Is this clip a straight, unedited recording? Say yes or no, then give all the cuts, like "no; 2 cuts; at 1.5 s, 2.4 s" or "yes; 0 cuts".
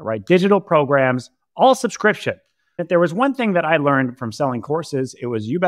no; 1 cut; at 2.7 s